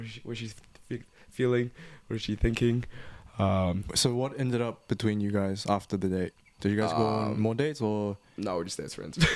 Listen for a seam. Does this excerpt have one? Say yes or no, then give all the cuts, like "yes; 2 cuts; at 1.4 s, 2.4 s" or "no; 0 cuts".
no; 0 cuts